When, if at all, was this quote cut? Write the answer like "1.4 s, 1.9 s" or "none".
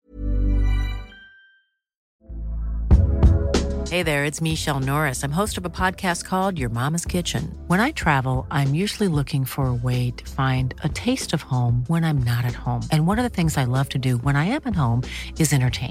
2.0 s